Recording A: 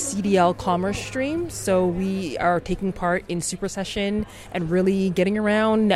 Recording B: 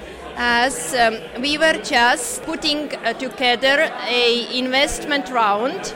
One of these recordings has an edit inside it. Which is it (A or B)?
B